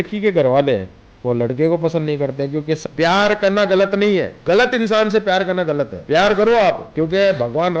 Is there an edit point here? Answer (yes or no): yes